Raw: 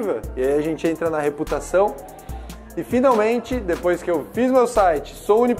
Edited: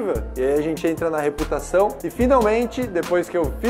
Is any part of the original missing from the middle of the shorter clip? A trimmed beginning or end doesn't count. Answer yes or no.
yes